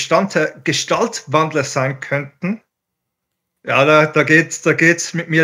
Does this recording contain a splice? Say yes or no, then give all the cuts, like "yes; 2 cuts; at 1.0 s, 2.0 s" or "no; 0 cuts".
no; 0 cuts